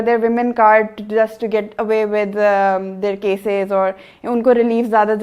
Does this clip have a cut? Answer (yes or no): no